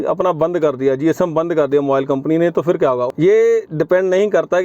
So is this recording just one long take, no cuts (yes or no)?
no